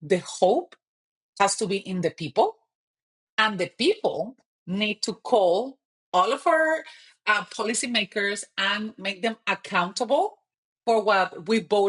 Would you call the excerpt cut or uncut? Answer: uncut